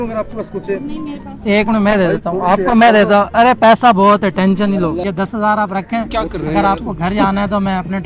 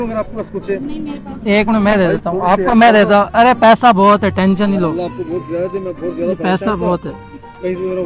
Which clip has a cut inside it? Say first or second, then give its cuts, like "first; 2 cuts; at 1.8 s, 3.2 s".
first; 1 cut; at 5.0 s